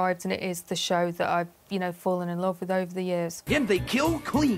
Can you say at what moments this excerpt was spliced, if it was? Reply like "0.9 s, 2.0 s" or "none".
3.4 s